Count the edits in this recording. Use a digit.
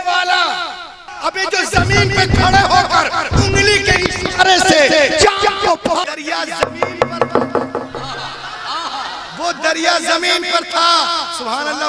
2